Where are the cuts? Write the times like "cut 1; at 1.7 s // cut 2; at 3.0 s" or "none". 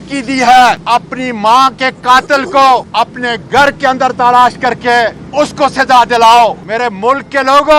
cut 1; at 0.8 s // cut 2; at 2.9 s // cut 3; at 5.2 s // cut 4; at 6.6 s